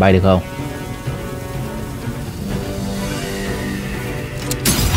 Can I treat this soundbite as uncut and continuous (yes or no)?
yes